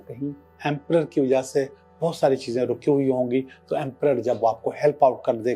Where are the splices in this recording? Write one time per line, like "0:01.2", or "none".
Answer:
none